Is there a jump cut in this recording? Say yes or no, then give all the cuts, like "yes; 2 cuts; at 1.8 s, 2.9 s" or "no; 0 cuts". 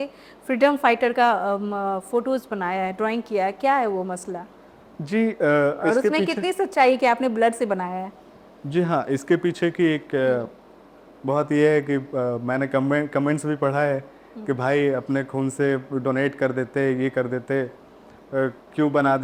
no; 0 cuts